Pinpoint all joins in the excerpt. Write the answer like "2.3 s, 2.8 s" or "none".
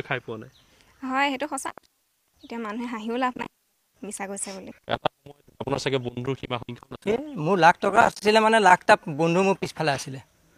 4.7 s

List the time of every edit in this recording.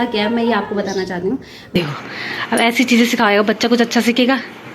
1.7 s

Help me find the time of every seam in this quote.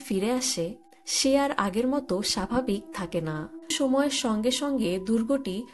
3.7 s

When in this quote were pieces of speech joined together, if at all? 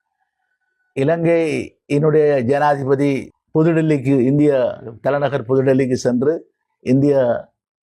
3.3 s

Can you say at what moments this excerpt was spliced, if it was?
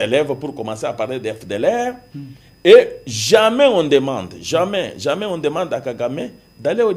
none

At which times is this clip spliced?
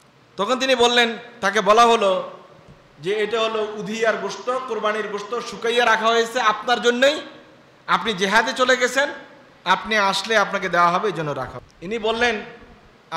11.7 s

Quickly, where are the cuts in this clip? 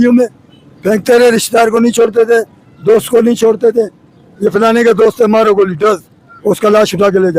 none

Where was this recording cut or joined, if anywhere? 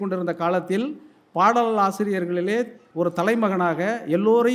2.8 s

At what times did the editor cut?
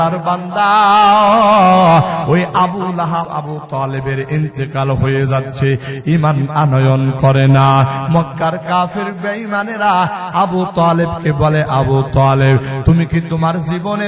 3.3 s

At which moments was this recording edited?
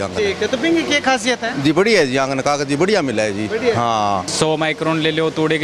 4.3 s

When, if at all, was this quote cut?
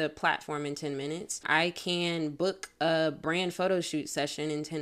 1.4 s

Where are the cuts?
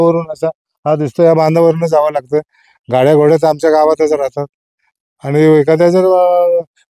none

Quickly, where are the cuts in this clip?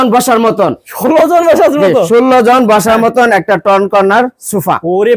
none

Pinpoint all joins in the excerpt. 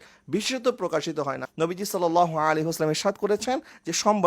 1.4 s

